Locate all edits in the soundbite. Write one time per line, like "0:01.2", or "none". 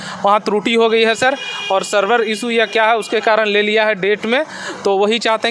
none